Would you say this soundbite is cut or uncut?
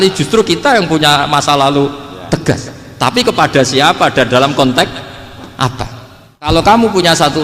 cut